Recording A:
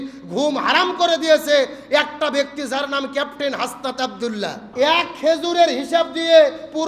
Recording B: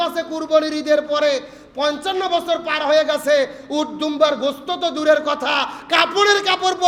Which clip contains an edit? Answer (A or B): A